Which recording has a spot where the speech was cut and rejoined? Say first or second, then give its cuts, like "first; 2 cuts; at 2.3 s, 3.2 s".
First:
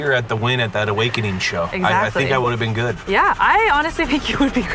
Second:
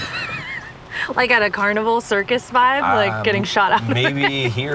first; 2 cuts; at 1.7 s, 3.0 s